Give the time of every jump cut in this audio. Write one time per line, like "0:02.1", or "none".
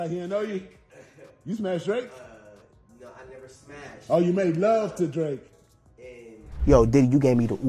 0:06.5